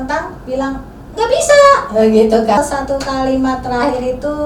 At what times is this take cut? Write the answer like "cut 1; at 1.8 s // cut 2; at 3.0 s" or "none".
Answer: cut 1; at 2.6 s